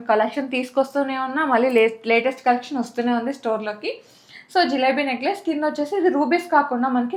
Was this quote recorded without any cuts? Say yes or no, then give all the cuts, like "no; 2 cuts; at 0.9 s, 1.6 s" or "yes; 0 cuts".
yes; 0 cuts